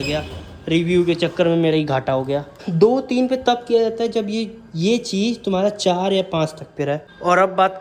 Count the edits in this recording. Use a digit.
0